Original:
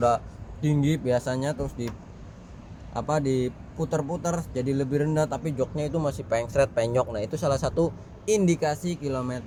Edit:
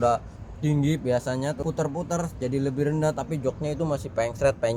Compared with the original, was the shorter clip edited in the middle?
yes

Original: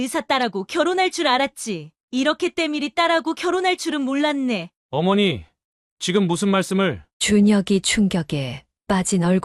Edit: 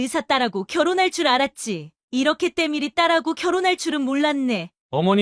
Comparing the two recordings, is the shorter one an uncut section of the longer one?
yes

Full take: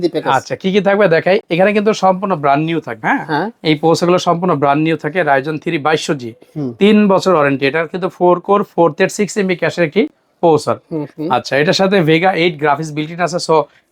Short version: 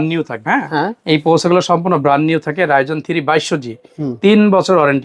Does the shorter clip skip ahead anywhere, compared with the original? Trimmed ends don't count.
no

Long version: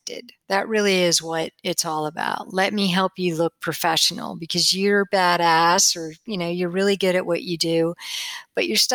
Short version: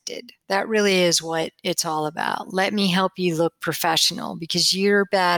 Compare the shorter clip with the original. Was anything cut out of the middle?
no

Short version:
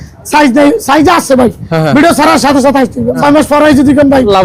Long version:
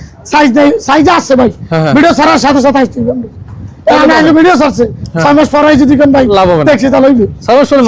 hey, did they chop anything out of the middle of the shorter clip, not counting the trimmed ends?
yes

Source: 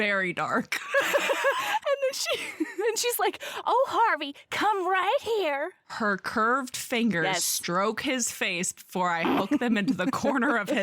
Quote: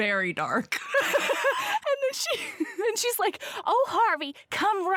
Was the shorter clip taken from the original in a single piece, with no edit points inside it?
yes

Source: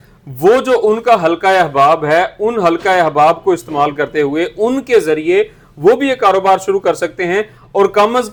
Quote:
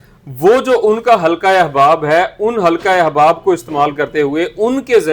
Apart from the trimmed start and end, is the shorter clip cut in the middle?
no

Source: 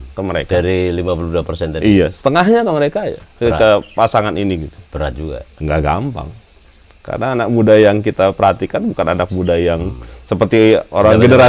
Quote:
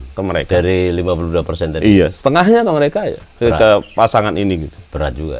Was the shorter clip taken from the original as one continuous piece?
yes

